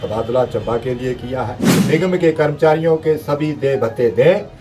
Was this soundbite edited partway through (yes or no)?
yes